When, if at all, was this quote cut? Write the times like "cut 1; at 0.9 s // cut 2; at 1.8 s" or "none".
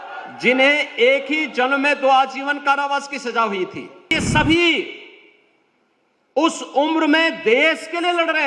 cut 1; at 4.1 s